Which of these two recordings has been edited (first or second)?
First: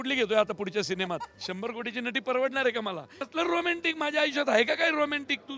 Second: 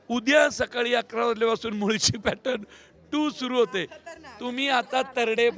first